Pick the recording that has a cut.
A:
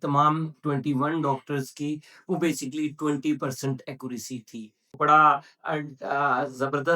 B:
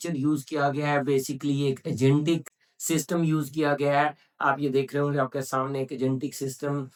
A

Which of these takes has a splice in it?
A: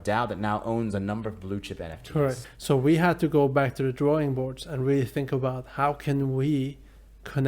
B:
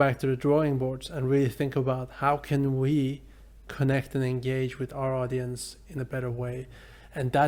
A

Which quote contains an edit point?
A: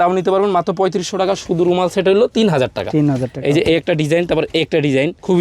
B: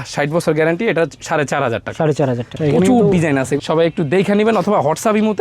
B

